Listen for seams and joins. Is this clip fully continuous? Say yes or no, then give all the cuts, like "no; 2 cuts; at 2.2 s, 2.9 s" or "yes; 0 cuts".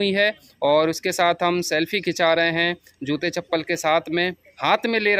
yes; 0 cuts